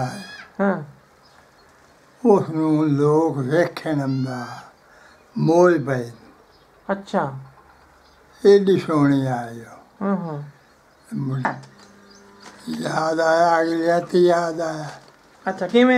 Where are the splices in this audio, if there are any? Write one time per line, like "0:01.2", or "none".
0:11.5

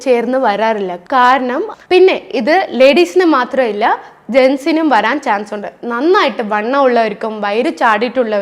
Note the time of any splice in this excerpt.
0:01.7

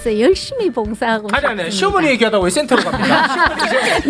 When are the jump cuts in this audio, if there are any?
none

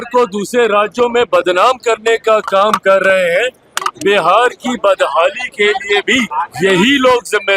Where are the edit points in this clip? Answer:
0:06.3

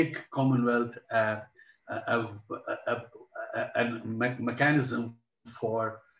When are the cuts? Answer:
none

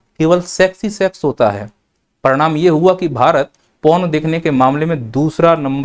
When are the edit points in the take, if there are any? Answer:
none

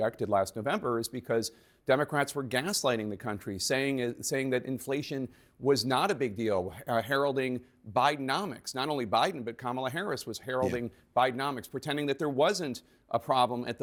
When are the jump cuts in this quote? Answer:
none

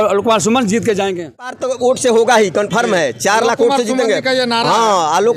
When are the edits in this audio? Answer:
0:01.5

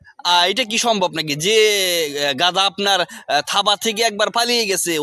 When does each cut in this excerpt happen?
none

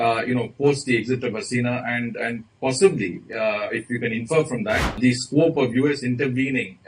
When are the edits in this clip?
0:05.0

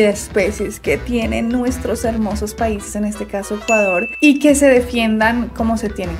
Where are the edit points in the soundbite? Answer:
none

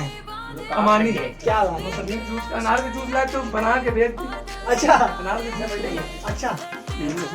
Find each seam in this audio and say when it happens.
0:01.3

